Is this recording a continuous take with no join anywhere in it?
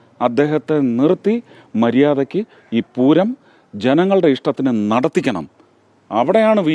yes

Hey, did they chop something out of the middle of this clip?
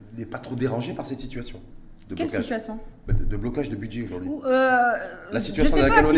no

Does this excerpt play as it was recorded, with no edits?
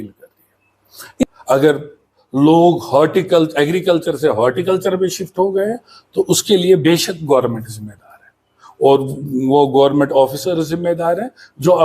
no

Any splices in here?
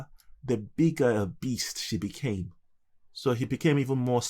yes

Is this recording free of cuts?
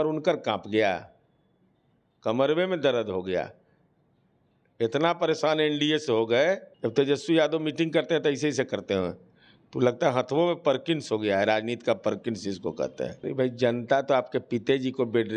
no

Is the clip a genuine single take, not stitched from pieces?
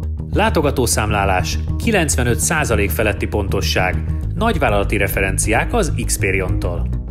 yes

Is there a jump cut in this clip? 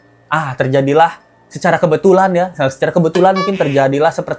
no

